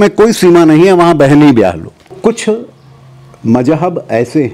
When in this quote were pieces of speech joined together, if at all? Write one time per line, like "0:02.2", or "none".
0:02.1